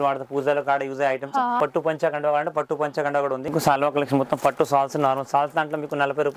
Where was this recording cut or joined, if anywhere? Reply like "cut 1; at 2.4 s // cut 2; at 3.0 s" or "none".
cut 1; at 1.6 s // cut 2; at 3.5 s

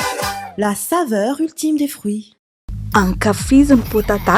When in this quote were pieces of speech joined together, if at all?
cut 1; at 2.4 s

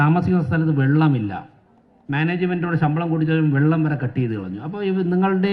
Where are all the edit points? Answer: none

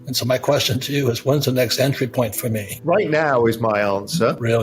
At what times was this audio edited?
cut 1; at 2.7 s

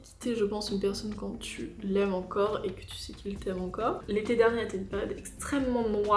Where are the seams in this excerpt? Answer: cut 1; at 4.0 s

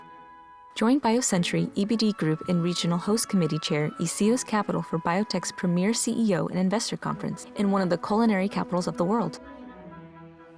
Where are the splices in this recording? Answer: cut 1; at 9.3 s

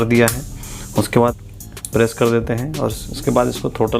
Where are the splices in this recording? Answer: cut 1; at 1.4 s

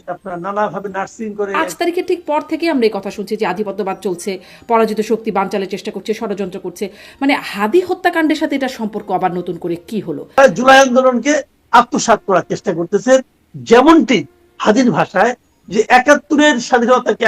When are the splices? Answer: cut 1; at 1.6 s // cut 2; at 10.4 s

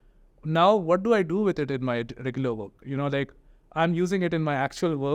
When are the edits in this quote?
cut 1; at 2.8 s

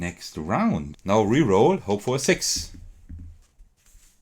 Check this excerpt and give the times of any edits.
cut 1; at 0.9 s

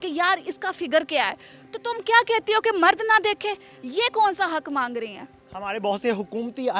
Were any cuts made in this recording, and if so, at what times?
none

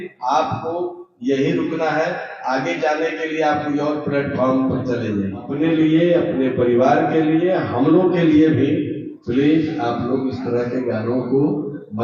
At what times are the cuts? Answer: cut 1; at 5.5 s

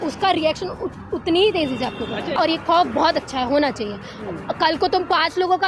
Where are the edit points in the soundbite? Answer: cut 1; at 2.3 s

